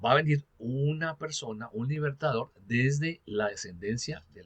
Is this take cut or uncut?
cut